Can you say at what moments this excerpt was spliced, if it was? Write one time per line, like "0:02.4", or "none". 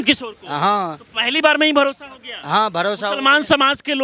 none